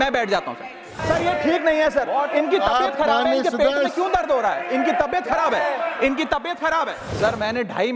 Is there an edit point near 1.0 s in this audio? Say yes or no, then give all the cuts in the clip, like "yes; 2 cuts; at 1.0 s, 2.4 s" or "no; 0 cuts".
yes; 2 cuts; at 1.0 s, 7.0 s